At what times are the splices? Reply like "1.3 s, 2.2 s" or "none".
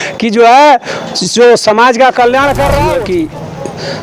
2.9 s